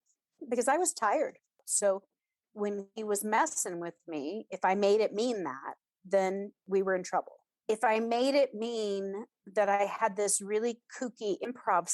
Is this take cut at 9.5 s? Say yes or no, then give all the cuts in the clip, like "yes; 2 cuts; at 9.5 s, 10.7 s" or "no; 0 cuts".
no; 1 cut; at 1.6 s